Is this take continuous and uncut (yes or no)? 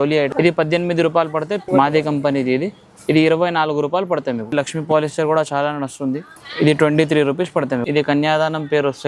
no